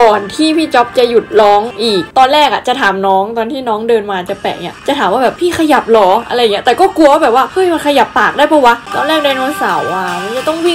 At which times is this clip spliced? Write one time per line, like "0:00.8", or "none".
0:02.1
0:08.8